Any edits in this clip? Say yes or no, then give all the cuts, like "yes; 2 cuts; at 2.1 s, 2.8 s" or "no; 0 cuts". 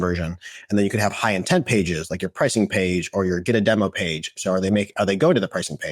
no; 0 cuts